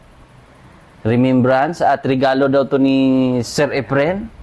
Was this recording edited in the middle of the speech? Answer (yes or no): no